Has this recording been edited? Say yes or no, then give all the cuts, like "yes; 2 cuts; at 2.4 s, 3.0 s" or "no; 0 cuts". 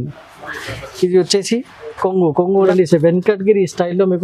yes; 1 cut; at 2.7 s